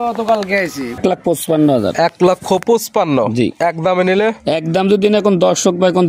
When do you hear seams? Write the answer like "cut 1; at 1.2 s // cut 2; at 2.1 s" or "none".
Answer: cut 1; at 1.0 s